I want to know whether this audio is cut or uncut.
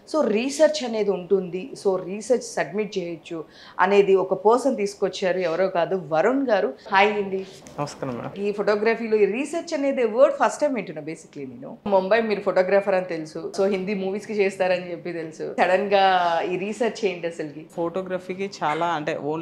cut